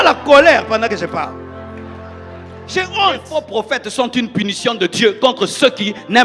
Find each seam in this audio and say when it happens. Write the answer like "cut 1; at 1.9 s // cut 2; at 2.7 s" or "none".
cut 1; at 3.4 s